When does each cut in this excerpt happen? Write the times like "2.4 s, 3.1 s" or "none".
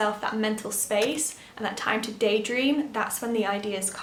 none